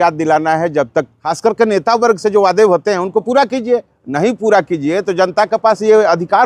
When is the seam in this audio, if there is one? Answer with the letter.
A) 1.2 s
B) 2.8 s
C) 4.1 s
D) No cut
A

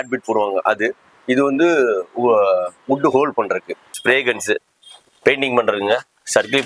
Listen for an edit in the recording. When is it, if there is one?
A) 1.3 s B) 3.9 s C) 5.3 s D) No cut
B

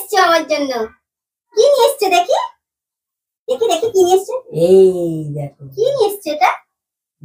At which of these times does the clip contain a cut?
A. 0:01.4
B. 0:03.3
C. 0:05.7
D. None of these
D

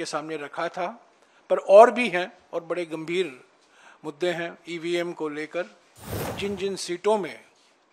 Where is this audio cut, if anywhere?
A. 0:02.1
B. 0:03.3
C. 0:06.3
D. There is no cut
C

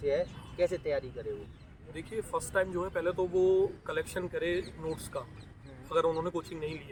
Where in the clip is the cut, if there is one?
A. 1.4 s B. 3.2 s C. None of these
C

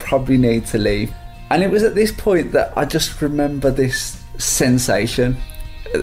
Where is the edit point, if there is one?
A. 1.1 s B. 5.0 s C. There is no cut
A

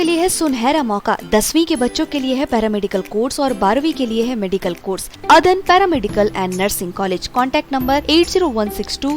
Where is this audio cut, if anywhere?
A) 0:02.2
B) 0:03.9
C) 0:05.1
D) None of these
C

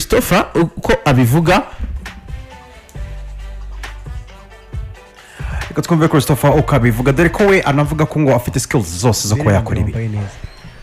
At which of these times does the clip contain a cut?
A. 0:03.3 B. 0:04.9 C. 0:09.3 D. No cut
A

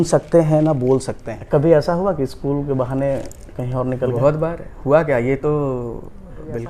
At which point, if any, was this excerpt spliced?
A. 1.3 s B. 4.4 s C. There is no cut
A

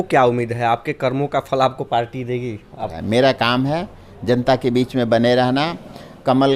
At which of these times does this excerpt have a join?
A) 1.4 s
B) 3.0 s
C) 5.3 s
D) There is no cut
B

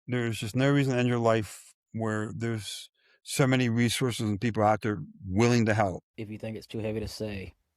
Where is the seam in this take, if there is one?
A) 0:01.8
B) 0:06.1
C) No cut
B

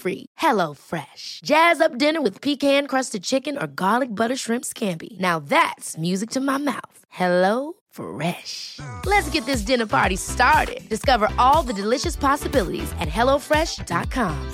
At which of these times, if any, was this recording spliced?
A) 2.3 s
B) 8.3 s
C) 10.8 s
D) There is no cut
D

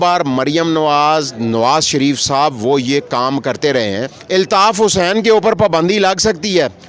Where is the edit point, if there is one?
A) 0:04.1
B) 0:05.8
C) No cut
A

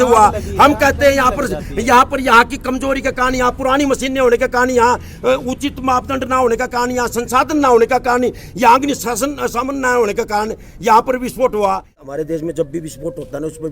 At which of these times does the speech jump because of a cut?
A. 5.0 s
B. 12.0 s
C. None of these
B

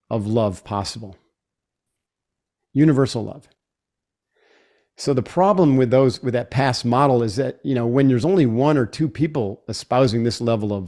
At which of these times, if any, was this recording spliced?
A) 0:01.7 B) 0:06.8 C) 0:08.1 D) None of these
D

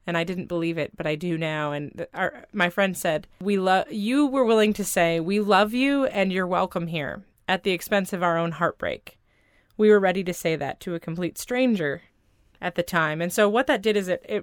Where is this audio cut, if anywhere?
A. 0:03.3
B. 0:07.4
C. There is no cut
A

